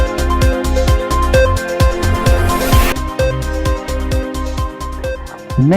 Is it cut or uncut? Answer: cut